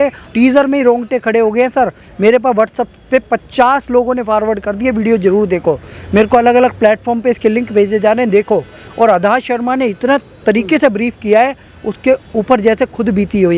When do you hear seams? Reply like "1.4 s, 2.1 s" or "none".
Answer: none